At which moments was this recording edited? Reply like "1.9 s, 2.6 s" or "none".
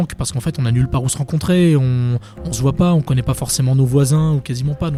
none